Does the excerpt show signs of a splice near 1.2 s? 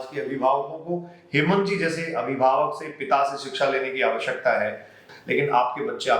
no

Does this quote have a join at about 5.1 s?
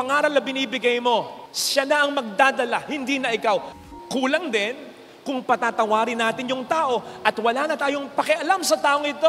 no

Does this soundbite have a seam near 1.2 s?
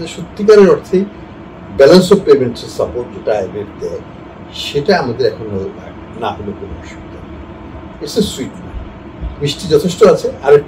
no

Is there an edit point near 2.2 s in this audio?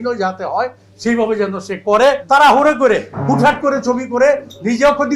yes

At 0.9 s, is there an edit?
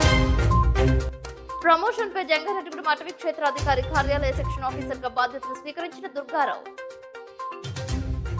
yes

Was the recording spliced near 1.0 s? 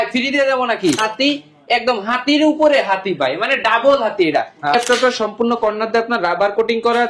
yes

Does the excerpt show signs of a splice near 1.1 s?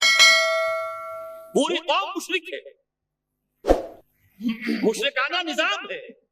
yes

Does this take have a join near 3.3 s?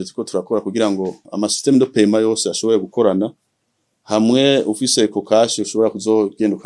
no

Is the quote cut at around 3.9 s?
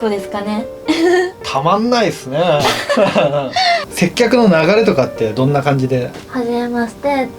yes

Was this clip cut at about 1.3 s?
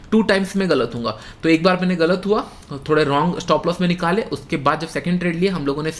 no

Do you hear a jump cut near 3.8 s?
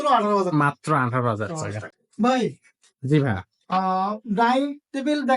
no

